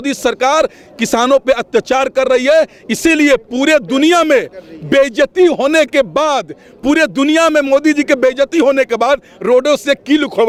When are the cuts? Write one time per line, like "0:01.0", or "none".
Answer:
none